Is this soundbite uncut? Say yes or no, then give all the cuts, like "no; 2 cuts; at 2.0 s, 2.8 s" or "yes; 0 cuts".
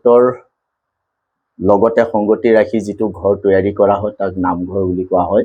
yes; 0 cuts